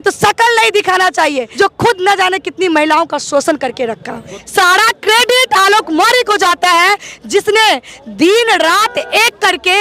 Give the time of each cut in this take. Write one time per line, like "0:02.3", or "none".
0:01.5
0:04.3